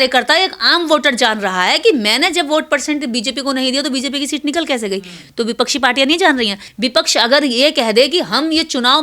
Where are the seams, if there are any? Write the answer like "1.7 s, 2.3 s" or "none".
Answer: 6.6 s